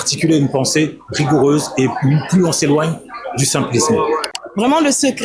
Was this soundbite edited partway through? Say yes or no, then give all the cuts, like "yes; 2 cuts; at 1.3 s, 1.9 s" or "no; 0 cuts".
yes; 1 cut; at 4.3 s